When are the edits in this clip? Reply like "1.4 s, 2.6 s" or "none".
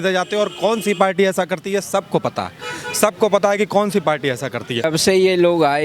4.9 s

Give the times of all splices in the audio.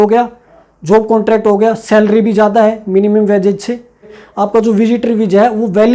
4.2 s

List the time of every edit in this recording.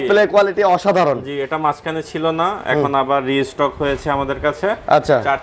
none

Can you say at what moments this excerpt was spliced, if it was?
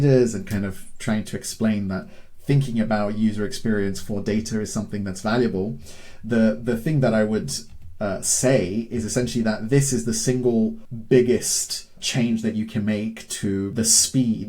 10.9 s, 12.0 s, 13.7 s

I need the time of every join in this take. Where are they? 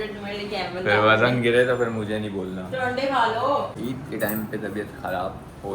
3.7 s

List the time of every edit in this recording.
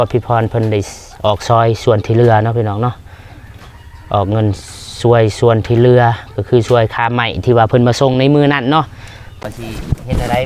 9.3 s

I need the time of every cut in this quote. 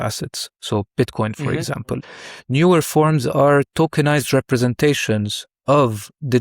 2.1 s

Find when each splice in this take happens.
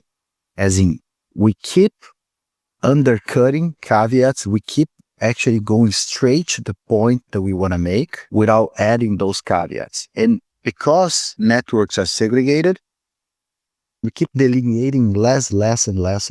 8.2 s, 11.2 s, 14.1 s

